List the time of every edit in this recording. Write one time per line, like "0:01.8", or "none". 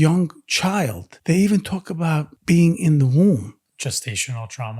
0:01.1
0:02.3
0:03.6

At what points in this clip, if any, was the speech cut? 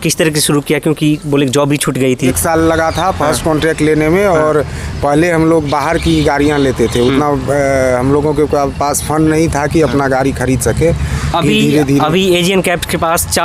none

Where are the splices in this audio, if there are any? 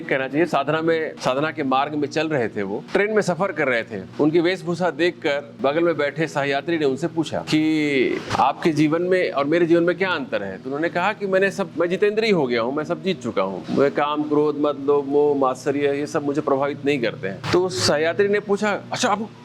0:01.1
0:02.8
0:04.0
0:05.5
0:07.4
0:08.3
0:11.7
0:13.6
0:17.4

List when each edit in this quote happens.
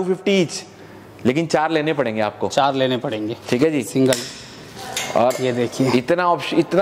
none

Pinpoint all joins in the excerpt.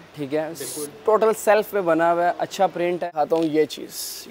0:03.1

